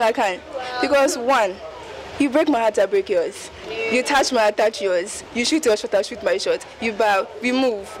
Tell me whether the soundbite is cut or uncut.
uncut